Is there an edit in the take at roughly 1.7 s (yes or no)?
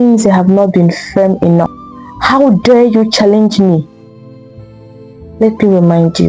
yes